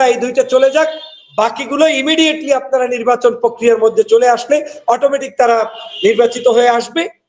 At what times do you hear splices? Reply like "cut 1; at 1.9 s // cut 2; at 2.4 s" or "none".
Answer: none

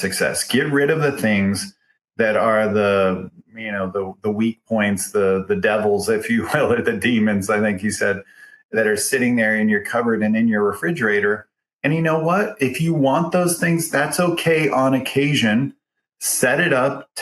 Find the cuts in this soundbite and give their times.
cut 1; at 8.7 s

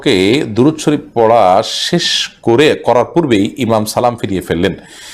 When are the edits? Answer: none

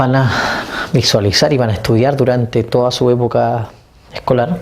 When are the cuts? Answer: cut 1; at 2.1 s

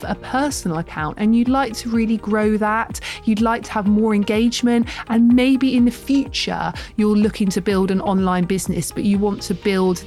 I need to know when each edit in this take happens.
none

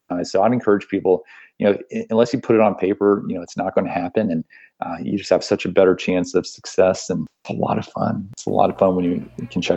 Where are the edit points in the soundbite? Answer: cut 1; at 7.4 s // cut 2; at 8.3 s

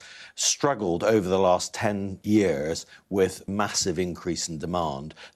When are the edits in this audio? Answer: cut 1; at 2.1 s // cut 2; at 3.5 s

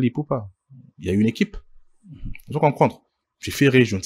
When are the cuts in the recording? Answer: none

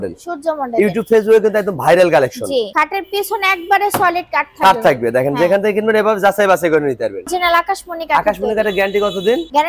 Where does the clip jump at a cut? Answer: cut 1; at 2.7 s // cut 2; at 7.2 s

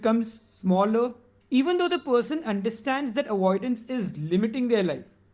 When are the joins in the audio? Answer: cut 1; at 1.3 s

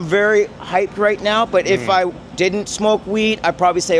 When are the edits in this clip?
none

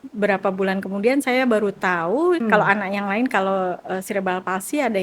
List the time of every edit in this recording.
cut 1; at 2.4 s

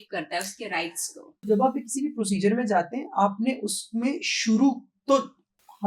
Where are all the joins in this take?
cut 1; at 1.5 s

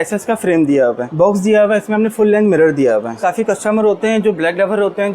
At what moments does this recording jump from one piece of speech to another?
cut 1; at 1.0 s // cut 2; at 3.2 s

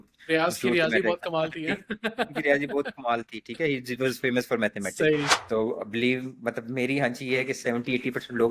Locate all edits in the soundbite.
cut 1; at 5.3 s

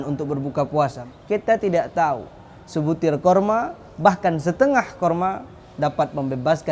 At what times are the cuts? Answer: cut 1; at 1.0 s

